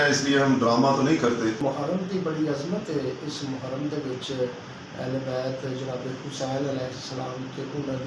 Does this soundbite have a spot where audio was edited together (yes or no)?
yes